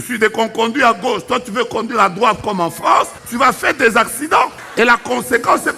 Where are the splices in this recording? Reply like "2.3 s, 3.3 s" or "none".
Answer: 3.2 s, 4.6 s